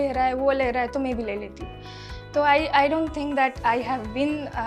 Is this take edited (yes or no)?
no